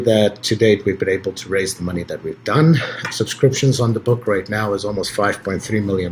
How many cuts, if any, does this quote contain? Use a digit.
1